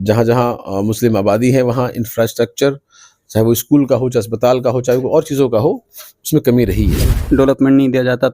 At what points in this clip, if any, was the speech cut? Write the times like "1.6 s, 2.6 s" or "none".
7.2 s